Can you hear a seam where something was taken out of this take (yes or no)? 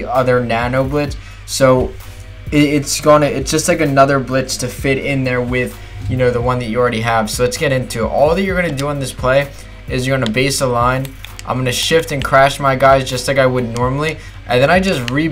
yes